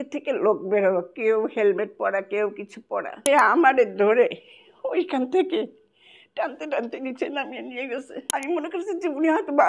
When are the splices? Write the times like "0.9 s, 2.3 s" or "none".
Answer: 3.2 s, 8.2 s